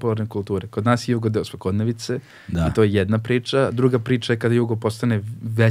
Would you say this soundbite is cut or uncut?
uncut